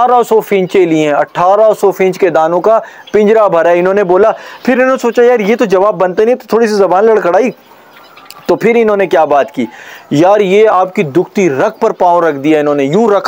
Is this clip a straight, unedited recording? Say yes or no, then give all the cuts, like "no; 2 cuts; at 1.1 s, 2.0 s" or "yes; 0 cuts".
yes; 0 cuts